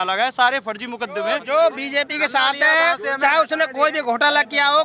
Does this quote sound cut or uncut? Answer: cut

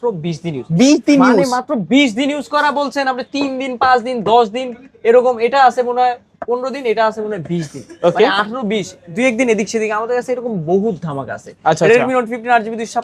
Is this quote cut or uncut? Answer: uncut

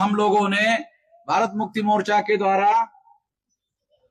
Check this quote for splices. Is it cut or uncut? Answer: uncut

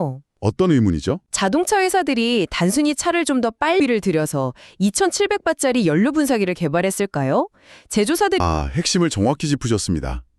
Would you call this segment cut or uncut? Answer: cut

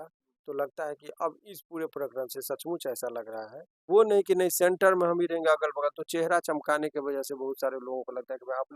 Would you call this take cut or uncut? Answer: cut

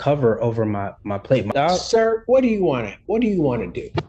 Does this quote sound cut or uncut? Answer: cut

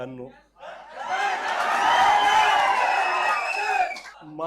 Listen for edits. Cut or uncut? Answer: uncut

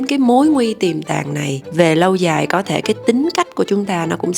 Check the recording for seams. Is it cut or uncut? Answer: uncut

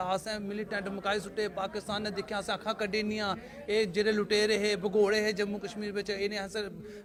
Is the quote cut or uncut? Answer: uncut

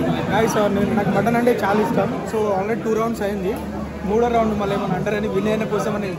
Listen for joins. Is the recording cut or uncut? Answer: uncut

